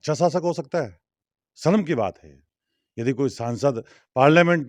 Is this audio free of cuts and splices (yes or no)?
yes